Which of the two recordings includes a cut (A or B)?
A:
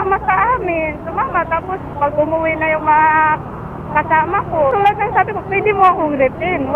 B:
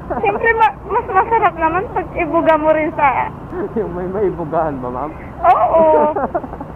A